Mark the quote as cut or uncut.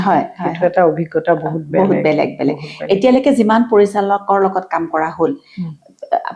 uncut